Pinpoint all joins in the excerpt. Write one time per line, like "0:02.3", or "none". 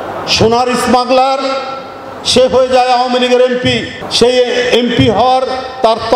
none